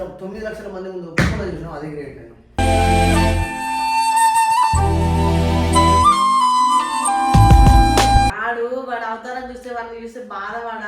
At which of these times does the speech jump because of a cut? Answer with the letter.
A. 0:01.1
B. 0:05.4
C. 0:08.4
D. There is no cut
C